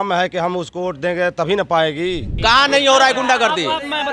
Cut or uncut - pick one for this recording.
cut